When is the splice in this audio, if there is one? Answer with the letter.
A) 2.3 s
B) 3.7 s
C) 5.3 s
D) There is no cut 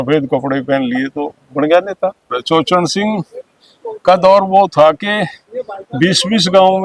A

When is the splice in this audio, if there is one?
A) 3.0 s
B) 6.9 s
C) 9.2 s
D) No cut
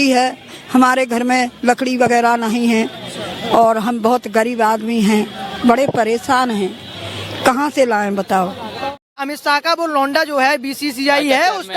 C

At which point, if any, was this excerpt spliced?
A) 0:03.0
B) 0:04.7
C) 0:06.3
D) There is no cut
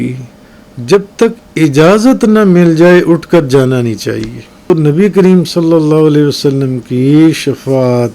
B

